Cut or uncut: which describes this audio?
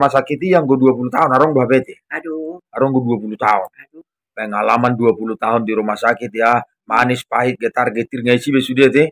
uncut